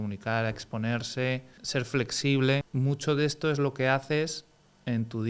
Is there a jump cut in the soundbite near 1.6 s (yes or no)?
yes